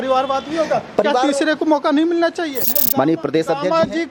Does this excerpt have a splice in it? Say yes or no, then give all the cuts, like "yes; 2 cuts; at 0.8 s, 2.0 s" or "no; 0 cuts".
yes; 1 cut; at 2.6 s